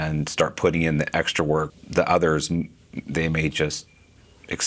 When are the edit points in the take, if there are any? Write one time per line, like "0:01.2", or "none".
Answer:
0:01.7

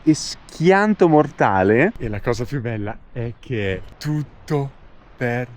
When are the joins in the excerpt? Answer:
0:02.1
0:03.9

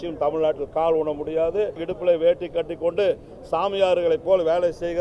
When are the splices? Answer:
0:01.9

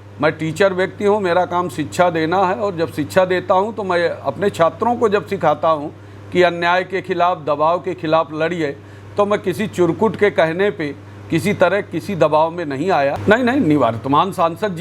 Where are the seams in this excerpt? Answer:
0:13.2

